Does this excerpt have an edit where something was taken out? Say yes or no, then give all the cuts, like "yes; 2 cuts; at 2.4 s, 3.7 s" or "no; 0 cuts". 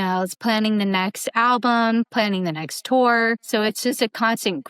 yes; 2 cuts; at 2.1 s, 3.4 s